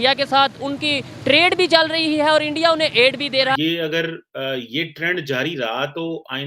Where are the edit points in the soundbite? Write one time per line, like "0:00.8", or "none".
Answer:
0:03.5